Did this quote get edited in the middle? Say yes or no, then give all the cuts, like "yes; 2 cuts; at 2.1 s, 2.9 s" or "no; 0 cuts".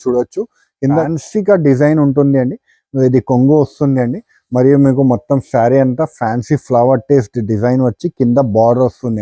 yes; 1 cut; at 1.0 s